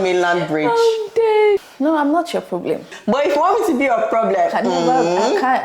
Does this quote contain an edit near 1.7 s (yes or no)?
yes